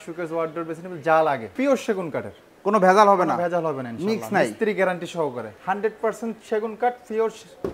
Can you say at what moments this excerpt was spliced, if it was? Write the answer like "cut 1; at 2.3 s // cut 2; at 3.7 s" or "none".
cut 1; at 1.5 s // cut 2; at 5.5 s